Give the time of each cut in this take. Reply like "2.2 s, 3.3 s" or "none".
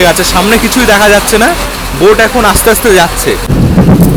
none